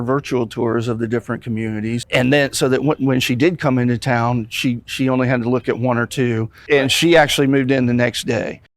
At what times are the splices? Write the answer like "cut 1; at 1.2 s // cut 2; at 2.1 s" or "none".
cut 1; at 2.0 s // cut 2; at 6.6 s